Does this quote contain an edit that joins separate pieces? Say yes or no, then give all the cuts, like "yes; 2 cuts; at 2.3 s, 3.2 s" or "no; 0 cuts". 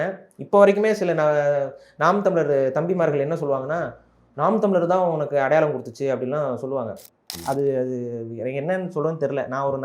yes; 1 cut; at 7.4 s